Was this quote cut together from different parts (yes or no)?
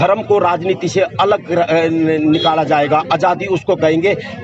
no